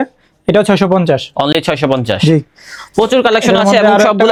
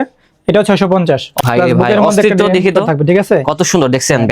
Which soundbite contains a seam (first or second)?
second